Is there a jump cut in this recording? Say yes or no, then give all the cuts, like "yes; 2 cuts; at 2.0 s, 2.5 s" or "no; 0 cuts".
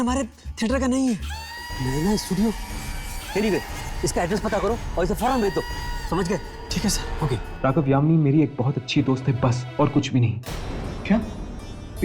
yes; 2 cuts; at 1.3 s, 7.5 s